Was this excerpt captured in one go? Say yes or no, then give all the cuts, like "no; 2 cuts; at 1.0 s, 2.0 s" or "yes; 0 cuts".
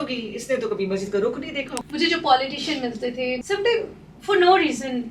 no; 2 cuts; at 1.7 s, 3.4 s